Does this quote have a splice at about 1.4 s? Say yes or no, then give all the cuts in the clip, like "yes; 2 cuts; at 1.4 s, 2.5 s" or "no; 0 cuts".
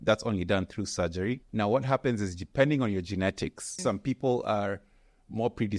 yes; 2 cuts; at 1.4 s, 3.8 s